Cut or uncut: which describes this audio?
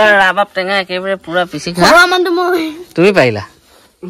uncut